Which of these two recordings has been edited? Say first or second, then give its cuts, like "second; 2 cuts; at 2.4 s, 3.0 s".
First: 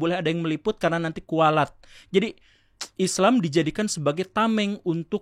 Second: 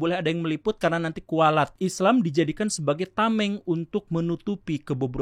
second; 1 cut; at 1.7 s